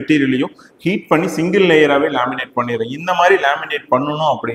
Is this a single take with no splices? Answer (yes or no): yes